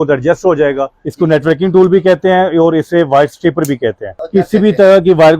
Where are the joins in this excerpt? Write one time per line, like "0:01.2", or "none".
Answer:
0:01.0
0:04.1